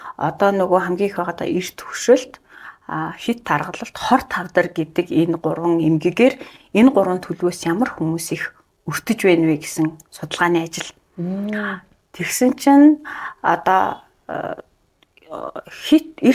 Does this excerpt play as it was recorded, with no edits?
yes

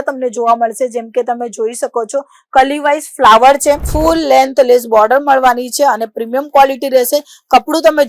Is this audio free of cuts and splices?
no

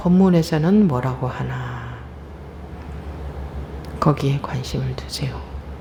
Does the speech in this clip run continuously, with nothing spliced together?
yes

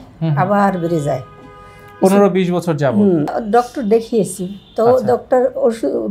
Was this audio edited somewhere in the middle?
yes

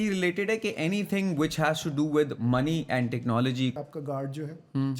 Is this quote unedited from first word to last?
no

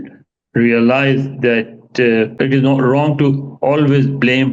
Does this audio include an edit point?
yes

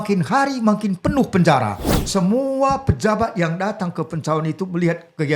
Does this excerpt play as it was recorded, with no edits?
no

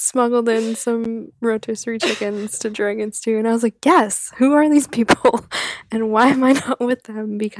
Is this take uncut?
yes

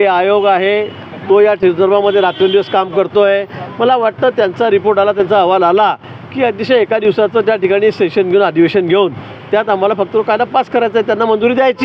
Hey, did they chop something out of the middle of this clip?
no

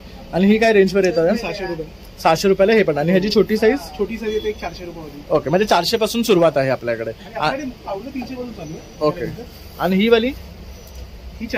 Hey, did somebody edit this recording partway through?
no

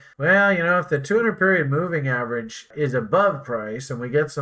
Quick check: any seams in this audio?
yes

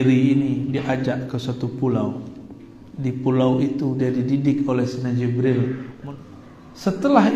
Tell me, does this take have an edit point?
yes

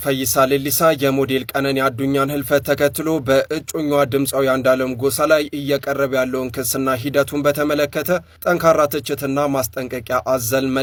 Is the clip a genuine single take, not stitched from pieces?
yes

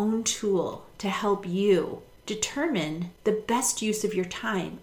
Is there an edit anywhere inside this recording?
yes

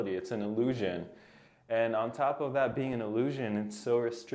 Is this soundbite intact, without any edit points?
yes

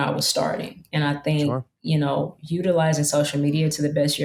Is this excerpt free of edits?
yes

